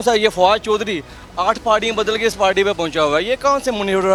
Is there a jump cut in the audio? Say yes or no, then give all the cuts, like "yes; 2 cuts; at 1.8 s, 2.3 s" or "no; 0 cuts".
no; 0 cuts